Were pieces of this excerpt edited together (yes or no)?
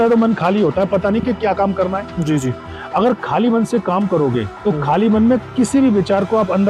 no